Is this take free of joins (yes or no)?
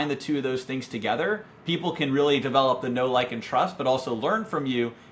yes